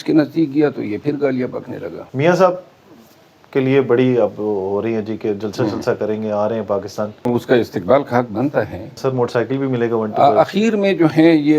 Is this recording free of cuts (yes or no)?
no